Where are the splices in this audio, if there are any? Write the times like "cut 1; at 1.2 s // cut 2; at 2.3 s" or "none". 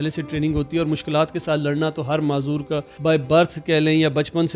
cut 1; at 2.9 s